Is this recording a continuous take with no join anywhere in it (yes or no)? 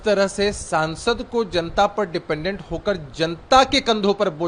yes